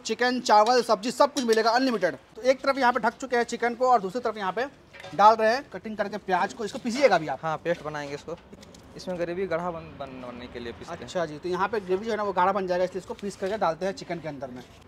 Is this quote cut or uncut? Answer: uncut